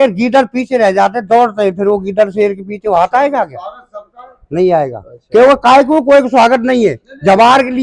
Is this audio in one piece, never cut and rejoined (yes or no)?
yes